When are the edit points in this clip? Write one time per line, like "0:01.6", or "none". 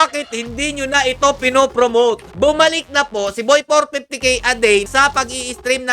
0:02.3
0:04.9